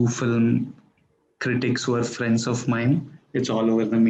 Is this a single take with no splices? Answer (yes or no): yes